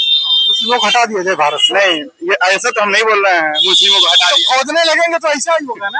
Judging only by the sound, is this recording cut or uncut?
uncut